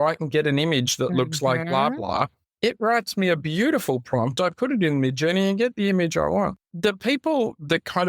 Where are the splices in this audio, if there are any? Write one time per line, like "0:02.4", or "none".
0:02.4
0:06.6

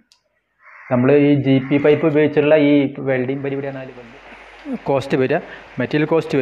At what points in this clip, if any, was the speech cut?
0:03.8

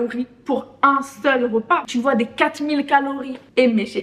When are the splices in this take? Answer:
0:01.8

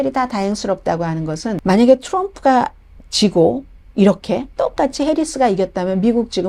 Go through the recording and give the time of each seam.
0:01.6

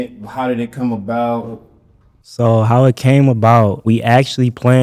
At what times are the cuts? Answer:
0:03.8

